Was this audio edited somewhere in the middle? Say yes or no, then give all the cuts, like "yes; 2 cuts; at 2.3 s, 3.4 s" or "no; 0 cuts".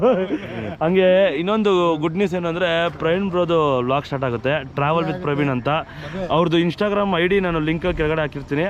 no; 0 cuts